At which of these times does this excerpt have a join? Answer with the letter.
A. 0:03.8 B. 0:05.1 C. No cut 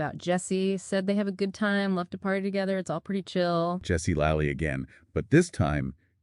A